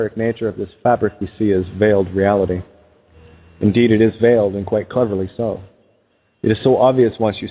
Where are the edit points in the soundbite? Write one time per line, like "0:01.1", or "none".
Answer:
0:04.2

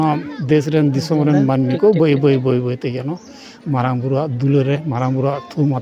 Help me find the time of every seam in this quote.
none

